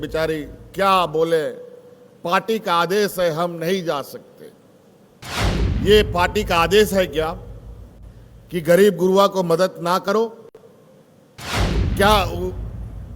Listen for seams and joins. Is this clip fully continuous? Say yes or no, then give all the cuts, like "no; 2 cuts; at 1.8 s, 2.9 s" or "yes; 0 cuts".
no; 2 cuts; at 5.4 s, 11.4 s